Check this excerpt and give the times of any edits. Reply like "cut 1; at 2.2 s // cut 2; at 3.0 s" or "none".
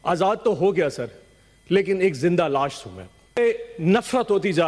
cut 1; at 3.4 s